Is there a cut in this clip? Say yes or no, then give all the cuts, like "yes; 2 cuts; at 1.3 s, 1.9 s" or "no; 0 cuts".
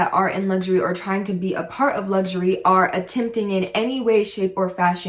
no; 0 cuts